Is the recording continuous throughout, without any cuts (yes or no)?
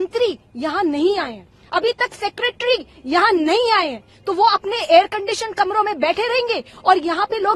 yes